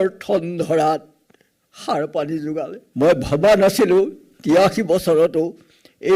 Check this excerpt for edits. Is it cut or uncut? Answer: cut